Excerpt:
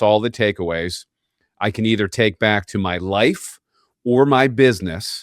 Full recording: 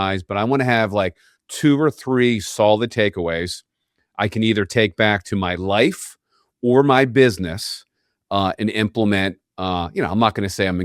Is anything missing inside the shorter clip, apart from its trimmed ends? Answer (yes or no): no